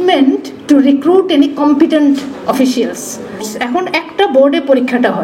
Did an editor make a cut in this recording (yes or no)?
yes